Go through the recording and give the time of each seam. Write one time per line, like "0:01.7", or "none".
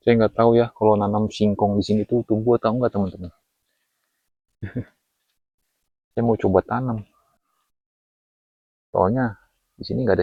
none